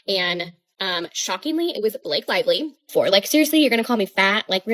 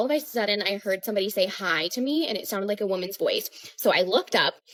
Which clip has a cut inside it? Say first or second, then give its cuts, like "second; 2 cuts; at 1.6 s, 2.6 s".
first; 1 cut; at 2.9 s